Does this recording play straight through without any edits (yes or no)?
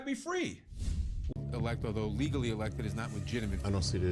no